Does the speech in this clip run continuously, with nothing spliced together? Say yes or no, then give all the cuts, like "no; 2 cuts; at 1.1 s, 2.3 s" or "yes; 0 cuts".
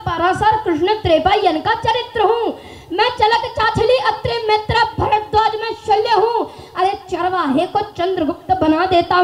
yes; 0 cuts